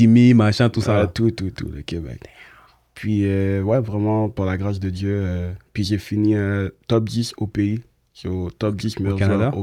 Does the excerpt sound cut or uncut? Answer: uncut